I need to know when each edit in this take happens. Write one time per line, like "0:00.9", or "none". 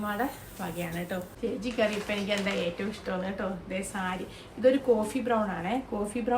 0:01.3